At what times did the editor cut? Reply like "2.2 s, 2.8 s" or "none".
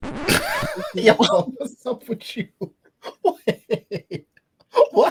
none